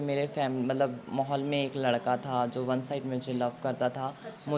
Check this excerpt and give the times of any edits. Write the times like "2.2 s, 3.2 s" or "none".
none